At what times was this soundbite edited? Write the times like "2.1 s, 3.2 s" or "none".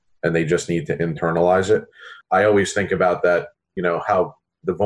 2.0 s